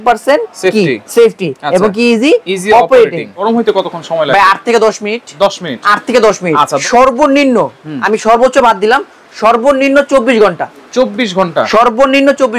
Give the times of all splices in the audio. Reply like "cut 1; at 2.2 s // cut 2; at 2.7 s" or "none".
cut 1; at 3.4 s // cut 2; at 6.8 s